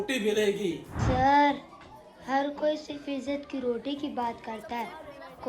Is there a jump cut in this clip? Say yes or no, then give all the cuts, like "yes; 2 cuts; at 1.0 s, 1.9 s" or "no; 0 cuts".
yes; 1 cut; at 0.9 s